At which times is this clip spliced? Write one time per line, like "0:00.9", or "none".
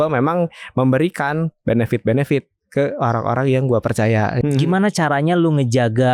0:04.4